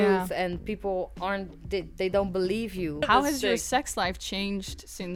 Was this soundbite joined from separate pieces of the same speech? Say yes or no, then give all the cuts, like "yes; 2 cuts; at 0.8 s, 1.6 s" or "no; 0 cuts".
yes; 1 cut; at 3.1 s